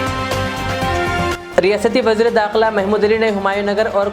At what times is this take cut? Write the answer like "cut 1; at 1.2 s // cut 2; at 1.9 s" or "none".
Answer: cut 1; at 1.3 s